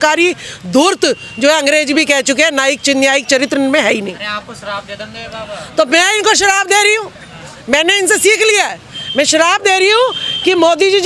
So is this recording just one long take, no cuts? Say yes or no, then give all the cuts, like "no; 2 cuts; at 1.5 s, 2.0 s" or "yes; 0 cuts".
yes; 0 cuts